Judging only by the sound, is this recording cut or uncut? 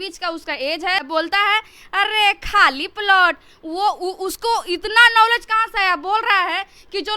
cut